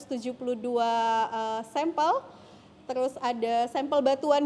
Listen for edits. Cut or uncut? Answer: uncut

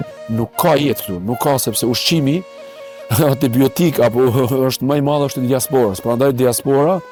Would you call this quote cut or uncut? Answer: uncut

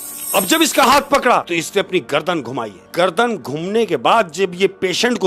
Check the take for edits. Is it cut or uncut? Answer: cut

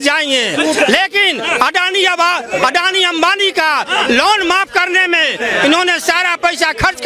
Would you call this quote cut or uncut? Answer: uncut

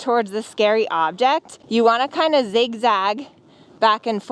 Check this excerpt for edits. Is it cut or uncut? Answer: cut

